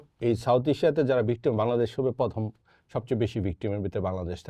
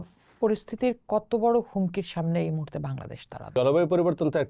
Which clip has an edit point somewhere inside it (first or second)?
second